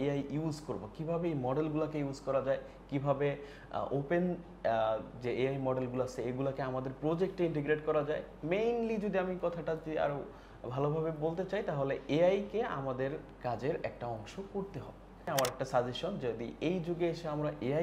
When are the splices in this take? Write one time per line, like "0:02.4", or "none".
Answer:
0:15.3